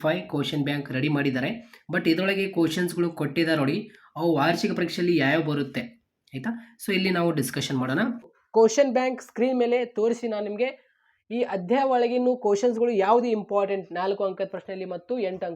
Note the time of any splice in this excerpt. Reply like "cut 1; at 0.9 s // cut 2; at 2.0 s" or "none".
cut 1; at 8.4 s